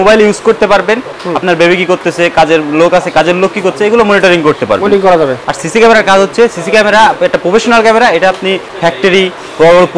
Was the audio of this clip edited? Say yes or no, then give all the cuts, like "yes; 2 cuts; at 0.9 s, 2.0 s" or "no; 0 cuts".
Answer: yes; 2 cuts; at 1.2 s, 5.4 s